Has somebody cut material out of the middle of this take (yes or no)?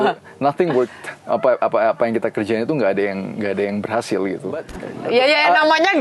yes